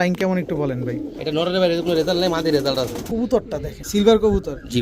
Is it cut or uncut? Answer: cut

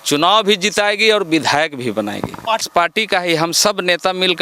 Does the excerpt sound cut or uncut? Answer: cut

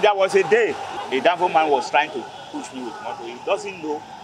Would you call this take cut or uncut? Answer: cut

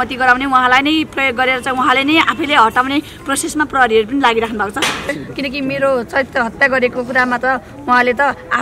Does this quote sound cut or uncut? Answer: cut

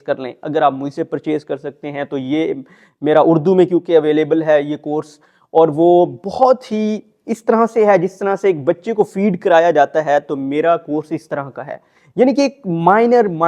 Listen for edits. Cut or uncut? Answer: uncut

